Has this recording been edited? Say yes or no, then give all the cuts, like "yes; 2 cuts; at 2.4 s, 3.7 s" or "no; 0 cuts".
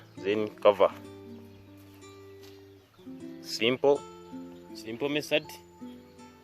yes; 1 cut; at 5.5 s